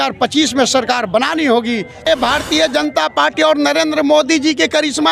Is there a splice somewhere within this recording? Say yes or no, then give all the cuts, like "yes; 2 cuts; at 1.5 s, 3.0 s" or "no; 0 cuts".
yes; 1 cut; at 2.0 s